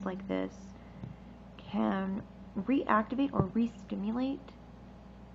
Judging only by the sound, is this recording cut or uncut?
uncut